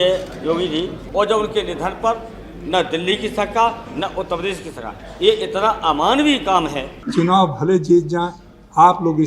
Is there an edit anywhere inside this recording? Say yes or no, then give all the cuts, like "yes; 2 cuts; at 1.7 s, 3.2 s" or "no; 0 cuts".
yes; 2 cuts; at 1.0 s, 6.9 s